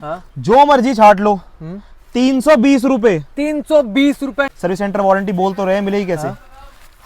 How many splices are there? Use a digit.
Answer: 1